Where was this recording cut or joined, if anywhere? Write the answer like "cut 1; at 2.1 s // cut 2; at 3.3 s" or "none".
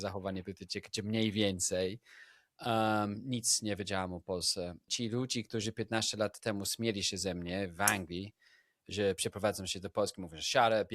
cut 1; at 4.9 s